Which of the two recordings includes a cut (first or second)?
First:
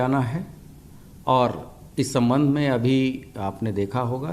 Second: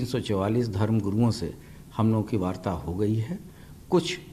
first